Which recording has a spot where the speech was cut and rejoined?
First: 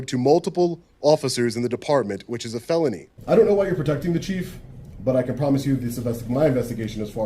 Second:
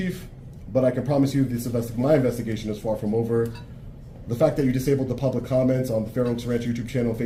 first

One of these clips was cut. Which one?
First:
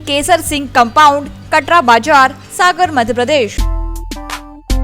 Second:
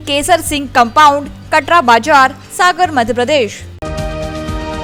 first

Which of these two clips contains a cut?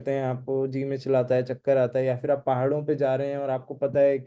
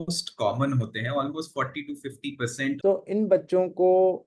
second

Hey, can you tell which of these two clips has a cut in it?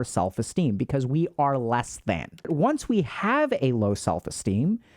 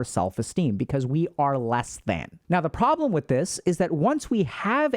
first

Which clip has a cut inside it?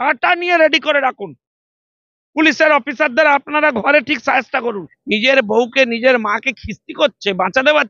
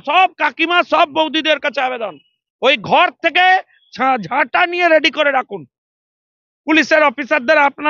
first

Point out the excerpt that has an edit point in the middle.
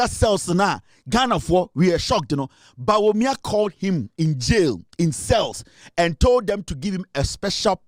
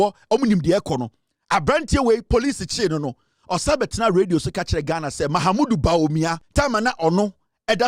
second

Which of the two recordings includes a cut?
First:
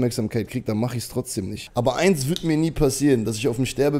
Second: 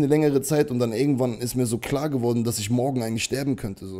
first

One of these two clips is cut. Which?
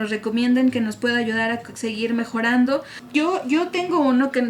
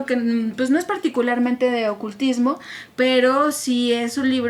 first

